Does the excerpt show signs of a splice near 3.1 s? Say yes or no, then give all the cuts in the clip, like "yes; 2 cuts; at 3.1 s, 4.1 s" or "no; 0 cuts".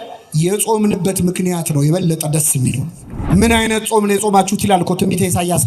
yes; 1 cut; at 3.1 s